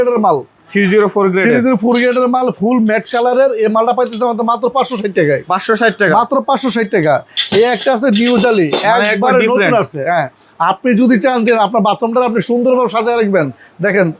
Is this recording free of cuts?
yes; 0 cuts

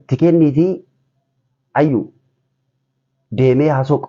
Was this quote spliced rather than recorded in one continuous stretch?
no; 0 cuts

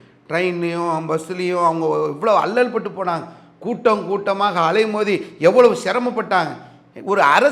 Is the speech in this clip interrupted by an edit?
no; 0 cuts

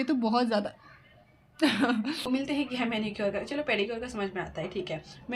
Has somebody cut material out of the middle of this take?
yes; 1 cut; at 2.3 s

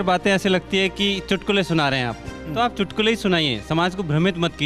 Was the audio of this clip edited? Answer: no; 0 cuts

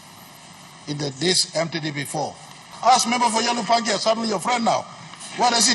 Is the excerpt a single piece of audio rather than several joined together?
no; 1 cut; at 2.7 s

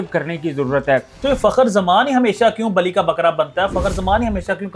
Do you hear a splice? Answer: yes; 1 cut; at 1.1 s

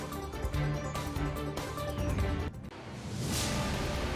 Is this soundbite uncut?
no; 1 cut; at 2.4 s

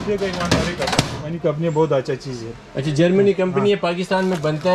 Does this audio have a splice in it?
yes; 1 cut; at 1.4 s

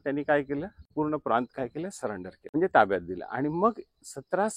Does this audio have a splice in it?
yes; 2 cuts; at 0.9 s, 2.3 s

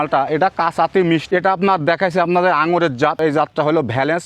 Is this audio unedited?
no; 2 cuts; at 1.2 s, 3.2 s

